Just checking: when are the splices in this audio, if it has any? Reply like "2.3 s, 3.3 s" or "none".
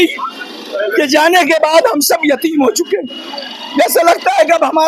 none